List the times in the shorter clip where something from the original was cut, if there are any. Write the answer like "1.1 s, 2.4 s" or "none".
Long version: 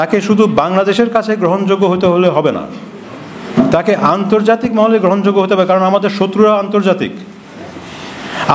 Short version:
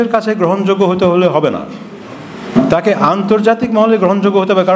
none